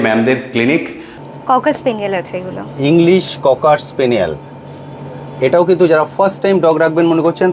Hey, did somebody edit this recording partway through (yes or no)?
yes